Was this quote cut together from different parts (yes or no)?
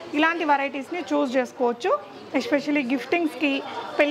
no